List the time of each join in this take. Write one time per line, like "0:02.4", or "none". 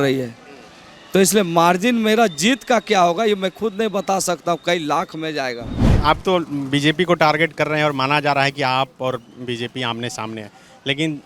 0:05.9